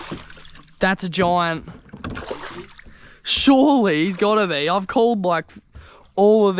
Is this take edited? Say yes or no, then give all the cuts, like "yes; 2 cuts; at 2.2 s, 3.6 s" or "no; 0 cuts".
no; 0 cuts